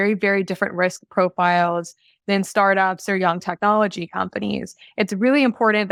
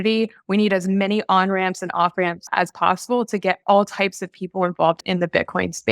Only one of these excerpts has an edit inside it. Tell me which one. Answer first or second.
second